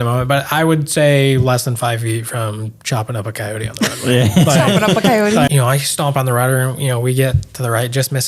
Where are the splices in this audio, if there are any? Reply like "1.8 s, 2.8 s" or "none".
5.5 s

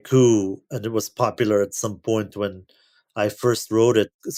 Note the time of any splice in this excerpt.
none

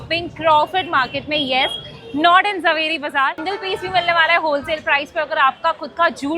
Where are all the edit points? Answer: 3.4 s

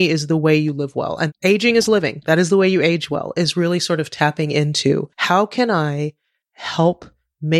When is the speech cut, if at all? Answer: 1.2 s, 5.1 s

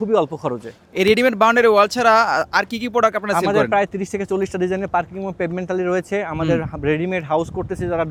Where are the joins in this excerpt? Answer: none

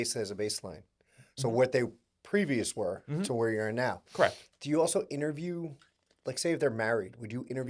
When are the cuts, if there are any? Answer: none

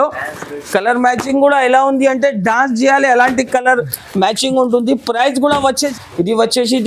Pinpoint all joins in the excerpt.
5.9 s

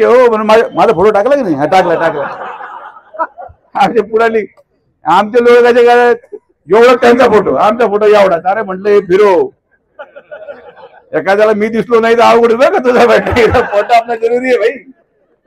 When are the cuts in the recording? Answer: none

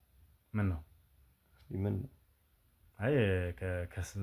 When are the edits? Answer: none

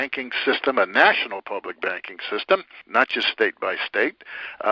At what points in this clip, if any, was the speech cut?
2.8 s

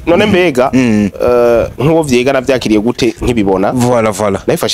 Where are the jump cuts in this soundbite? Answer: none

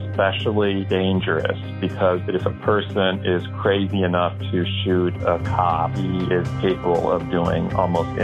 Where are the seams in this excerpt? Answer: 0.9 s, 2.2 s, 6.0 s

